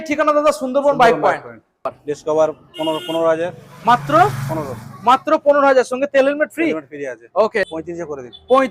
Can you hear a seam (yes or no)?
yes